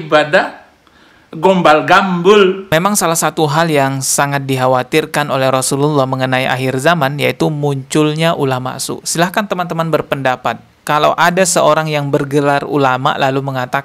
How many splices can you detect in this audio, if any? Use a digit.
1